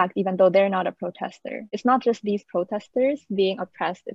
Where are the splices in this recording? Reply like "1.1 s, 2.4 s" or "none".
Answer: 1.7 s